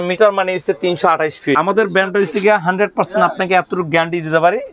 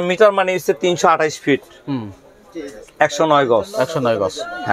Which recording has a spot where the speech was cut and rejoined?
first; 1 cut; at 1.6 s

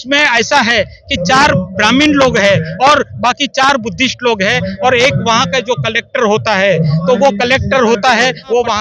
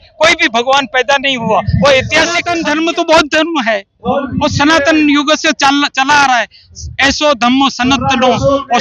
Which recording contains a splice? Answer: second; 1 cut; at 2.5 s

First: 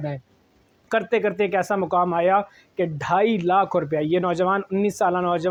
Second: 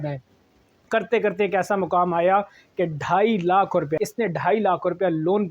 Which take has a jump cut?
second; 1 cut; at 3.9 s

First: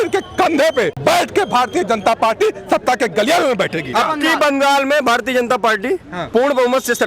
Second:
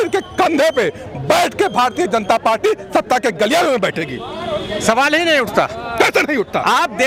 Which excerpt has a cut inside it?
first; 2 cuts; at 0.9 s, 3.9 s

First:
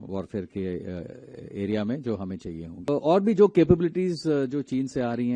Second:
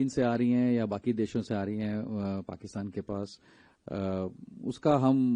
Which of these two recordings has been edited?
first; 1 cut; at 2.9 s

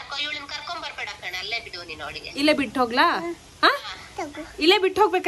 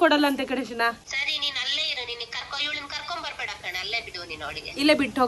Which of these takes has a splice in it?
second; 1 cut; at 1.1 s

